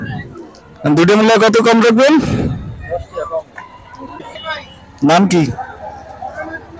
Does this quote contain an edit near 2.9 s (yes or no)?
no